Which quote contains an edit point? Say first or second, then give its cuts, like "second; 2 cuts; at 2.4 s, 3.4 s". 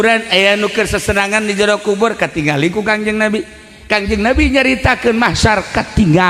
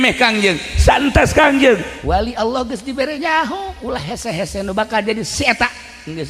second; 1 cut; at 1.9 s